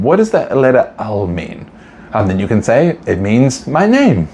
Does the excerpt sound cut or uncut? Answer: uncut